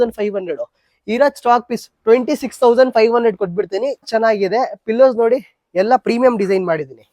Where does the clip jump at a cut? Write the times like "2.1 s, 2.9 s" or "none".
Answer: 4.1 s